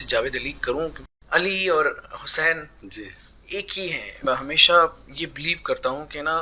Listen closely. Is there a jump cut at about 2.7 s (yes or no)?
no